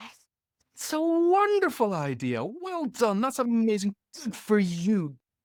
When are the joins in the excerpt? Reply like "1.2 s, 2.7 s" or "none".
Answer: none